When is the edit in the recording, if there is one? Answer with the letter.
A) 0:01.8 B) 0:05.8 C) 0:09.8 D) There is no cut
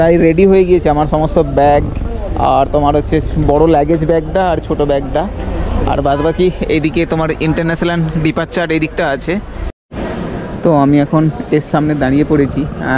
C